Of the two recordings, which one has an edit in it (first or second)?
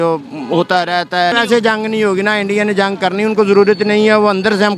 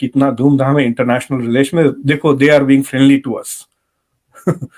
first